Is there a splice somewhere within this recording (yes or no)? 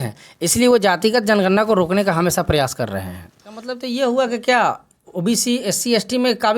yes